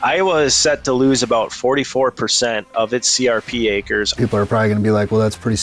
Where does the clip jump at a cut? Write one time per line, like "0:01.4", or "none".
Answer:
0:04.1